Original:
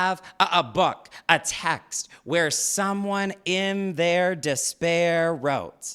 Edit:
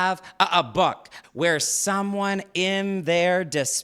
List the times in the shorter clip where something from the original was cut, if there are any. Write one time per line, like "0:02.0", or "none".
0:01.1